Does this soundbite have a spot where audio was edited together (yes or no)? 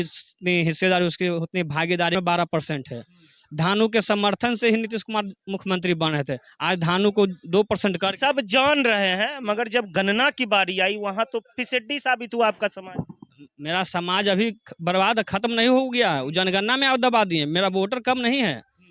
yes